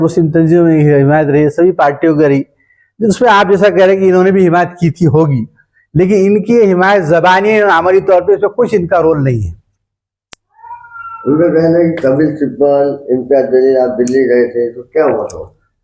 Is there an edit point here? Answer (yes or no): no